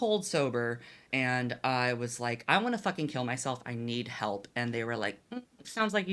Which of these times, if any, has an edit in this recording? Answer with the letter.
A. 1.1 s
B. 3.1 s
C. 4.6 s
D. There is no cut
A